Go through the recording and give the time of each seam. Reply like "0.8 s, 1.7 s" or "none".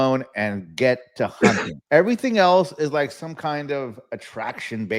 1.7 s

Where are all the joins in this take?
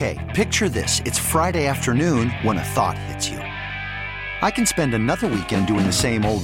none

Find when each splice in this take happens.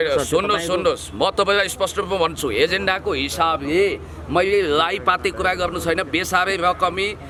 none

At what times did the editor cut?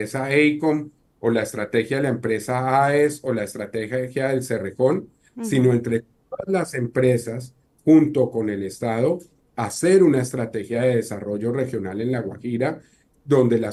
none

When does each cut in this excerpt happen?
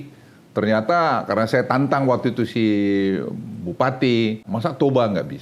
4.5 s

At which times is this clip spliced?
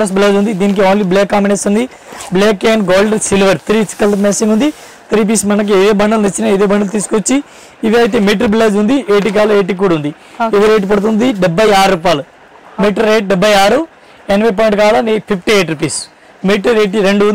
none

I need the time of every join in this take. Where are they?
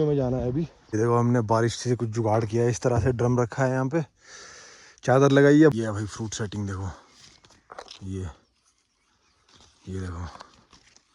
1.0 s, 5.7 s

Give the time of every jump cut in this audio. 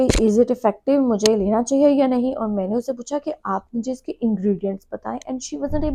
none

